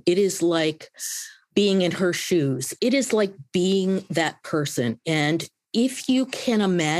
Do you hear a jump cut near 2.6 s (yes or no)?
yes